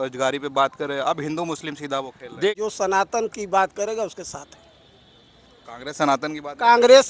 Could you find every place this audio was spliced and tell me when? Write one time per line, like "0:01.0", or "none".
0:02.5